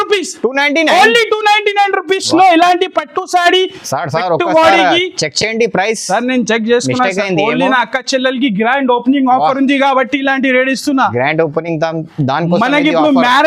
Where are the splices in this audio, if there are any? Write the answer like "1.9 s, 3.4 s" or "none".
none